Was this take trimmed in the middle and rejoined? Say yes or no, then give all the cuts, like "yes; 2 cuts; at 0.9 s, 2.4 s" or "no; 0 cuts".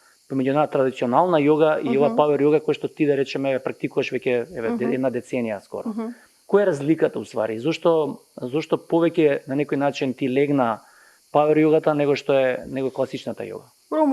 no; 0 cuts